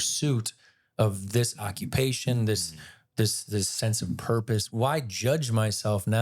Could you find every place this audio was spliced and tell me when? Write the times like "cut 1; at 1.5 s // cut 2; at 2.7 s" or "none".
cut 1; at 4.7 s

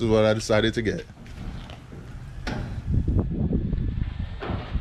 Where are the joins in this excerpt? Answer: none

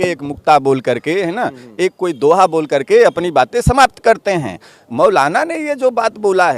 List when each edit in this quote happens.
none

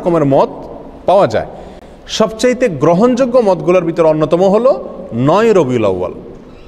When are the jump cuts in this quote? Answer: none

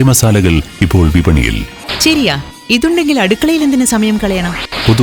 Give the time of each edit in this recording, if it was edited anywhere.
cut 1; at 1.8 s

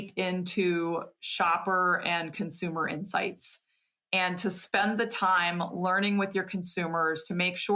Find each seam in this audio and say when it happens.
none

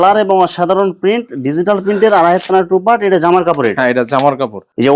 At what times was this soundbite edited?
none

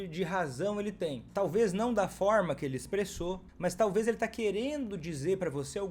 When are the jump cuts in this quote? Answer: cut 1; at 1.2 s // cut 2; at 3.5 s

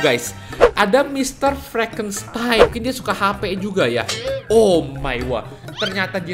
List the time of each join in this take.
cut 1; at 2.6 s

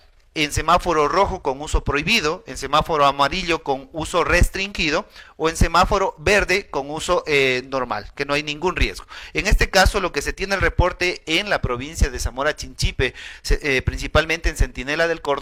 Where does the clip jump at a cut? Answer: none

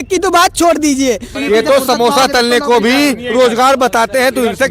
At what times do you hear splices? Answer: cut 1; at 1.3 s

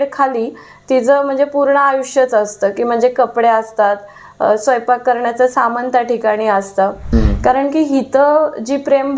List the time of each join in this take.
cut 1; at 7.0 s

